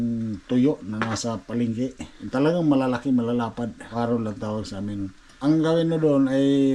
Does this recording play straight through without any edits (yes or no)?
no